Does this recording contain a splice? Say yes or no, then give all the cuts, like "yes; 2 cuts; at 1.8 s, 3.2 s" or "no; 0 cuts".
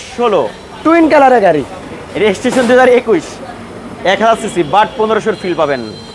no; 0 cuts